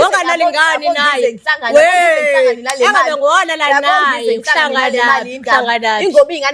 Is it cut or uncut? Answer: uncut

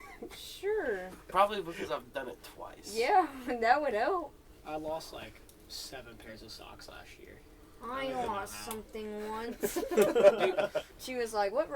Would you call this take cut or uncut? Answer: cut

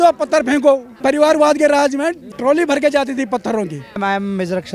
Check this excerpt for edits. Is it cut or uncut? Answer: cut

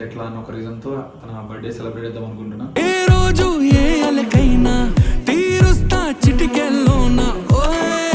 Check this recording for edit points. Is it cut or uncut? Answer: uncut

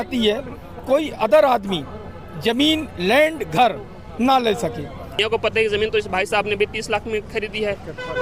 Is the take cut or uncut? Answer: cut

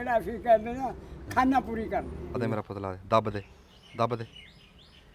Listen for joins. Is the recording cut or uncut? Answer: cut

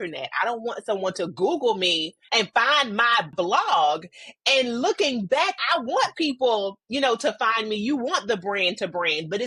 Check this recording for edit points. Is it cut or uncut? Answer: cut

